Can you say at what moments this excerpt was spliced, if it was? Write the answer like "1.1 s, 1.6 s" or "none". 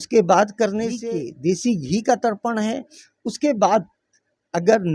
1.0 s